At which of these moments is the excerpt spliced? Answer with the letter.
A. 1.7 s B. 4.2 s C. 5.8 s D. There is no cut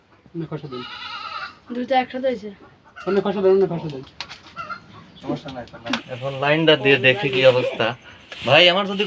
C